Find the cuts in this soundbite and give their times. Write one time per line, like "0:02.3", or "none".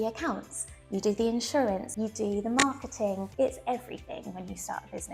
0:01.9
0:03.3